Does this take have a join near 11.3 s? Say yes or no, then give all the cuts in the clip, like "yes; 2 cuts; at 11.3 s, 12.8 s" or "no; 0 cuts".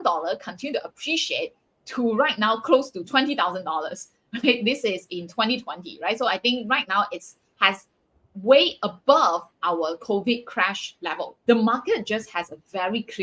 yes; 1 cut; at 11.3 s